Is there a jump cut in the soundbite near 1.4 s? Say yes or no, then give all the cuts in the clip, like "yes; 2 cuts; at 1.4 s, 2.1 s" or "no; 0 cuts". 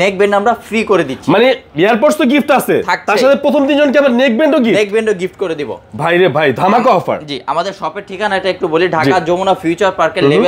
no; 0 cuts